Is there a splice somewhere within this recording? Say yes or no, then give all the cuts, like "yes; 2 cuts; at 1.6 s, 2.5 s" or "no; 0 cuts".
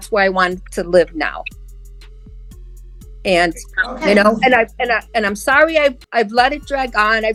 no; 0 cuts